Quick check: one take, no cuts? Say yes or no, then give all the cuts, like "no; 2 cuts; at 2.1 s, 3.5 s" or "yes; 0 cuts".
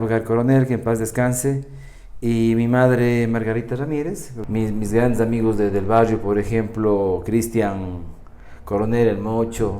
no; 1 cut; at 4.3 s